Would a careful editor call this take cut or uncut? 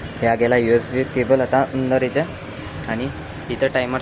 uncut